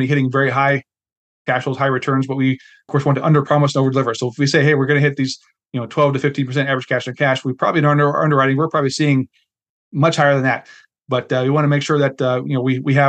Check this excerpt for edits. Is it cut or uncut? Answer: cut